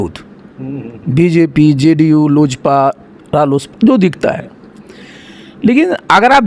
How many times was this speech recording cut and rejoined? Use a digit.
0